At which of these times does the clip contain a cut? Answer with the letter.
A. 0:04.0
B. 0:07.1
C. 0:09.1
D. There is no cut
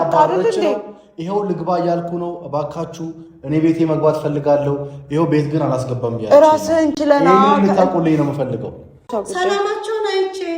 C